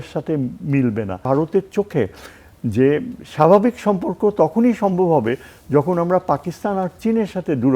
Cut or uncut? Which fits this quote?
cut